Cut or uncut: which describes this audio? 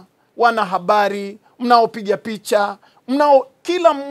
uncut